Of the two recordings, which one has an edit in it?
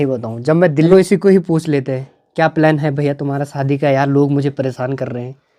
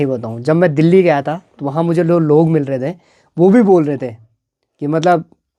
first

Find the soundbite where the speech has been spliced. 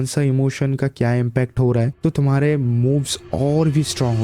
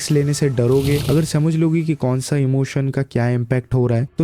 second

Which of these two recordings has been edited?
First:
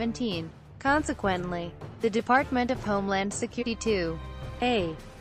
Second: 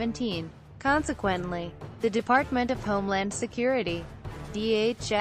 second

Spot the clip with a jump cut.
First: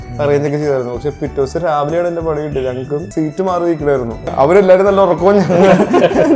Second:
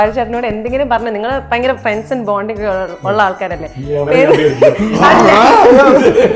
first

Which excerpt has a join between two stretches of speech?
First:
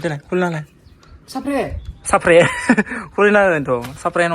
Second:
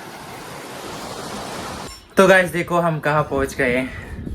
second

